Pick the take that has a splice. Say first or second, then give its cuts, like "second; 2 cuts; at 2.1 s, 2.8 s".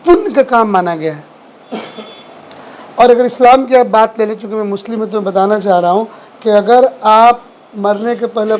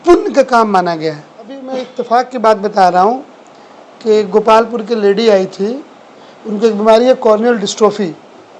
second; 1 cut; at 1.8 s